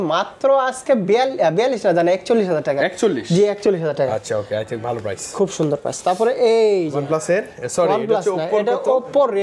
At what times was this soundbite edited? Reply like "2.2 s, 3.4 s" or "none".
none